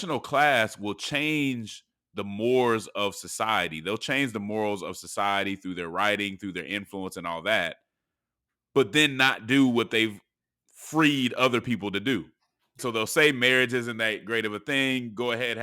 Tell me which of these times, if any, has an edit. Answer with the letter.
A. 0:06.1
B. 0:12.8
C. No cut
B